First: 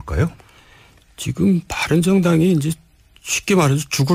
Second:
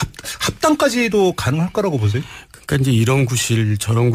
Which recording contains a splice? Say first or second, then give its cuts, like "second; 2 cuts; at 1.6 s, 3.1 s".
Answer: first; 1 cut; at 2.0 s